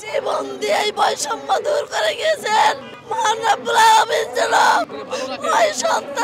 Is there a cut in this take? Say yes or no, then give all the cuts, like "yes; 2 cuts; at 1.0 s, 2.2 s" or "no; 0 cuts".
yes; 2 cuts; at 2.9 s, 5.0 s